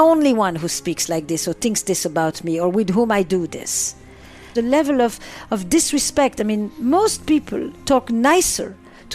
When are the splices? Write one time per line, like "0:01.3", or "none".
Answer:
0:04.5

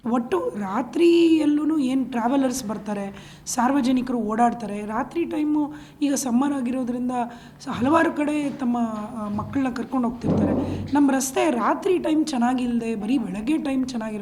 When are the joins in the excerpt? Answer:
none

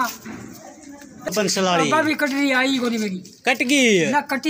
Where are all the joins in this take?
0:01.3

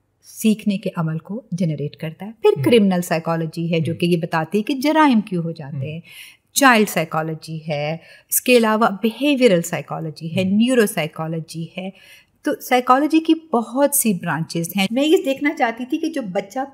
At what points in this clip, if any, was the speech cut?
0:14.9

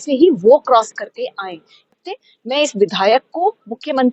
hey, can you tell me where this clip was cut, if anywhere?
0:01.9

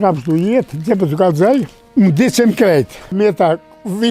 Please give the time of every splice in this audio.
0:01.8
0:03.1

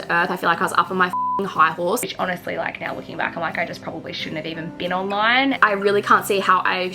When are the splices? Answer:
0:02.0
0:05.6

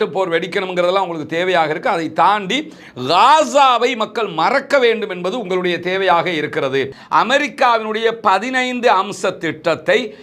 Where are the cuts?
0:07.0

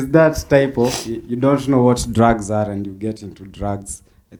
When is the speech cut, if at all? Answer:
none

